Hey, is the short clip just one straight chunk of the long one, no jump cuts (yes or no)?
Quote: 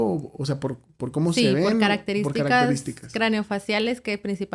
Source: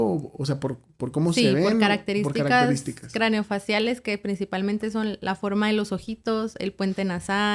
yes